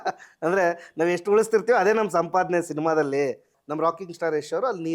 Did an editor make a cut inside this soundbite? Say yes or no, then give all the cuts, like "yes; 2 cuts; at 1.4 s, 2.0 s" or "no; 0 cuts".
yes; 1 cut; at 3.5 s